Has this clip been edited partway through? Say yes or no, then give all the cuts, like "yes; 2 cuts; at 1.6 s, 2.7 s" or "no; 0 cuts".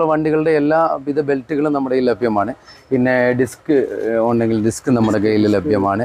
no; 0 cuts